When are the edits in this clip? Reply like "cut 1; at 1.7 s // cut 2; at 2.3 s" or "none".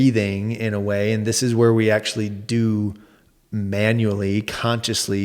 none

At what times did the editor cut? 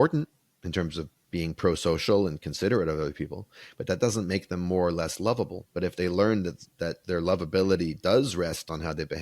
cut 1; at 1.2 s

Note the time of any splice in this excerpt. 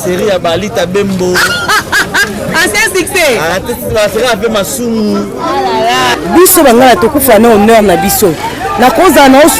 cut 1; at 6.2 s

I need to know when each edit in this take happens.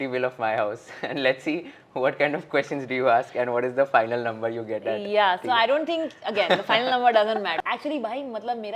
cut 1; at 7.6 s

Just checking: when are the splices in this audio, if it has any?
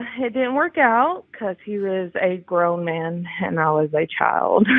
none

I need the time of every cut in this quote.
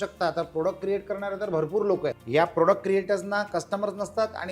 cut 1; at 2.2 s

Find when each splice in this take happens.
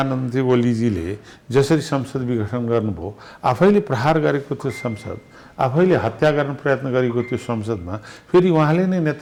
none

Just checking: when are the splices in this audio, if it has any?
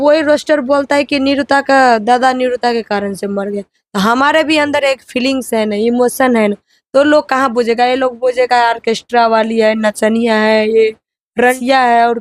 cut 1; at 11.2 s

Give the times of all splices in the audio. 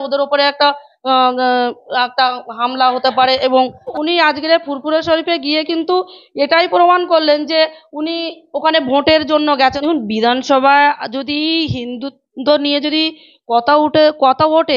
cut 1; at 3.9 s // cut 2; at 9.8 s

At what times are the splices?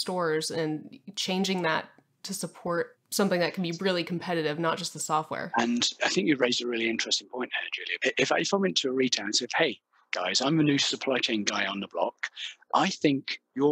cut 1; at 7.9 s

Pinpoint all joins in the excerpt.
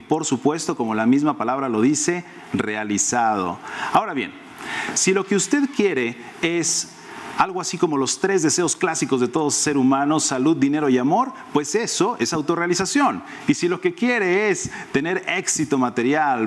cut 1; at 14.4 s

